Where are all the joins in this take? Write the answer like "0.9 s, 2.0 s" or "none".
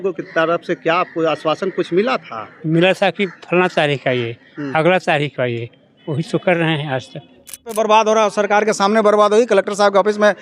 7.7 s